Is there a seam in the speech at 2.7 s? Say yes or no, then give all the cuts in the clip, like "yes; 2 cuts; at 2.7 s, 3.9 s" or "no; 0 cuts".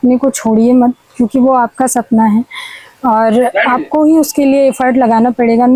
no; 0 cuts